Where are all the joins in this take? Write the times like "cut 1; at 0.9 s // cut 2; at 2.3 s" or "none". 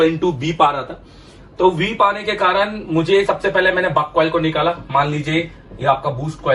none